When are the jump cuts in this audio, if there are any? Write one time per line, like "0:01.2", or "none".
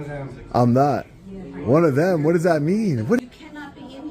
0:03.2